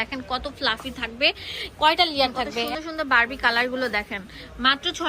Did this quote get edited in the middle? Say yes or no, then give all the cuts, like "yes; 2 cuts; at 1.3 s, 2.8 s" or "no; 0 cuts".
yes; 1 cut; at 2.7 s